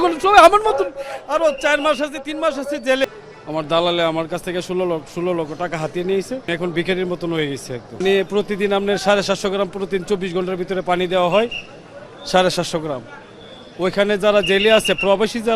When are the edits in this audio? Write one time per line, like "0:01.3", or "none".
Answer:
0:03.0
0:06.5
0:08.0